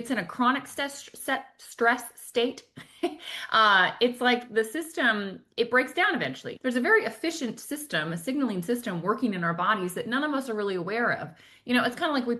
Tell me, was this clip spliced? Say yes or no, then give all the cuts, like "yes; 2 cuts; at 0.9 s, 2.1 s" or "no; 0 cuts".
yes; 1 cut; at 6.5 s